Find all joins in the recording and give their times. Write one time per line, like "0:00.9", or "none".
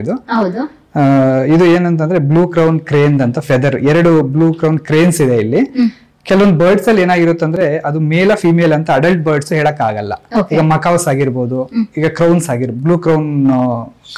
none